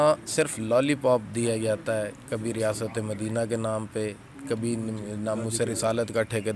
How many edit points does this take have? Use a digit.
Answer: 0